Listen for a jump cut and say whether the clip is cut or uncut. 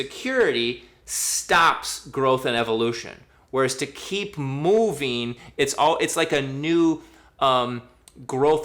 uncut